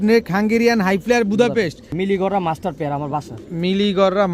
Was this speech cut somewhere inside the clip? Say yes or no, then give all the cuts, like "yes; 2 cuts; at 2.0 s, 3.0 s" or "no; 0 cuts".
yes; 1 cut; at 1.9 s